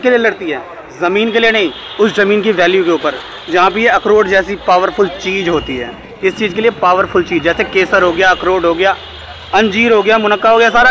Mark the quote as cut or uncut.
uncut